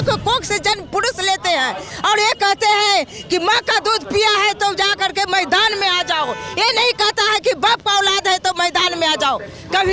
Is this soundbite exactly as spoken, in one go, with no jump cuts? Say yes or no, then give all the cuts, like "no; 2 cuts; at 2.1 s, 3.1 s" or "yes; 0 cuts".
yes; 0 cuts